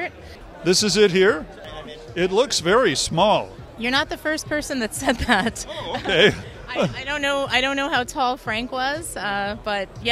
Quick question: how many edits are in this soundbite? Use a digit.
1